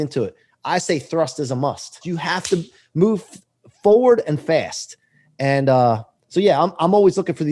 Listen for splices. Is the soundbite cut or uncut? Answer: cut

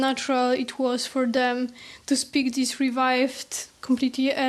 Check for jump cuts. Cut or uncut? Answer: uncut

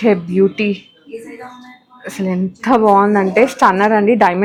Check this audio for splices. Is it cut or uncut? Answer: uncut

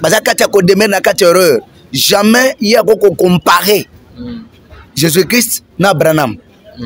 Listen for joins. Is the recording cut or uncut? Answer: uncut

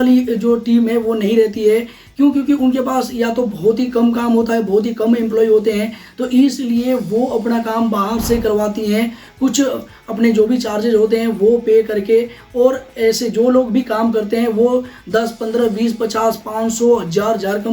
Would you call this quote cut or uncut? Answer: uncut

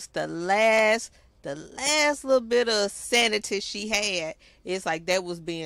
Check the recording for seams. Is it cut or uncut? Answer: uncut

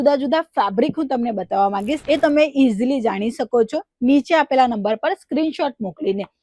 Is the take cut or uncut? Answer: cut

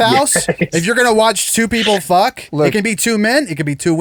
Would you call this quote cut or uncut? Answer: uncut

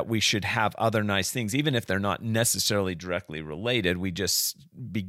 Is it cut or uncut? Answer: uncut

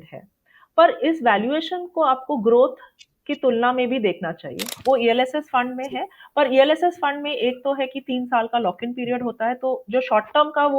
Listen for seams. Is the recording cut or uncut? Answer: cut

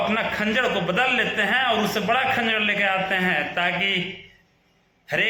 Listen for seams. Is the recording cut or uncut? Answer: uncut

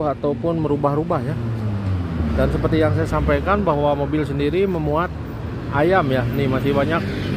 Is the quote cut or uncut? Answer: uncut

